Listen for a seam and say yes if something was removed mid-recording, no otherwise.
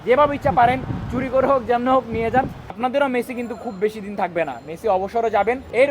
yes